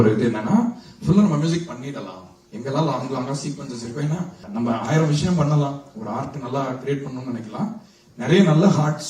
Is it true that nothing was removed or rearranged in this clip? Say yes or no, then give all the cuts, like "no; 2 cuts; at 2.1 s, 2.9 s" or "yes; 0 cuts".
no; 1 cut; at 4.4 s